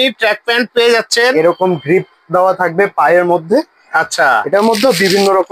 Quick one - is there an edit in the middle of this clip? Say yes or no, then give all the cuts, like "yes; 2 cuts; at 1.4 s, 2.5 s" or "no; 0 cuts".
no; 0 cuts